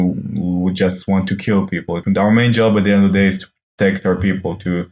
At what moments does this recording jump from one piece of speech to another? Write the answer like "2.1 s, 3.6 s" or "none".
2.0 s